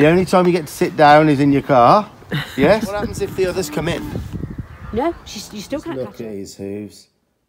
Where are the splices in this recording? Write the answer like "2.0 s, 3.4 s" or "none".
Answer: 3.2 s, 5.9 s